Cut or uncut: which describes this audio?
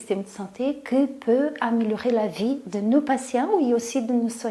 uncut